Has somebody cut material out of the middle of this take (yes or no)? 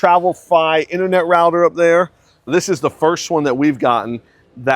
yes